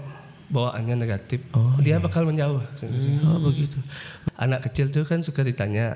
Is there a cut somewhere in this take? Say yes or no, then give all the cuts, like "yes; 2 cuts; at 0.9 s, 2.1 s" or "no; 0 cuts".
yes; 1 cut; at 4.1 s